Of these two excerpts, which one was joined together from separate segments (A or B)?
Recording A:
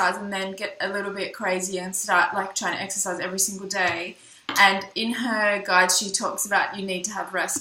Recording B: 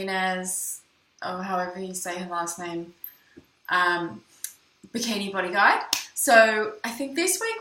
A